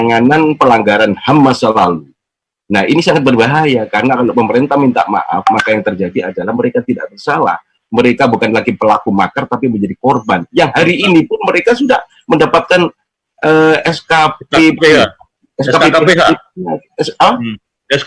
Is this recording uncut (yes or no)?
yes